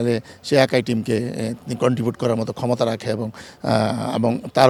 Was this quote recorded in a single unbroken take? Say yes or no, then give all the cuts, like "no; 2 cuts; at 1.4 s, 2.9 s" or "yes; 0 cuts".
yes; 0 cuts